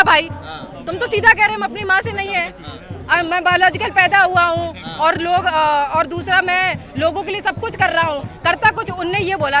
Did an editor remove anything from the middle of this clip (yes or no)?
no